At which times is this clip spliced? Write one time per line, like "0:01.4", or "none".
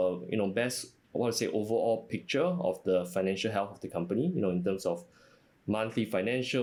none